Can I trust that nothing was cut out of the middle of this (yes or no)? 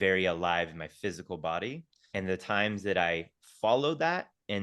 no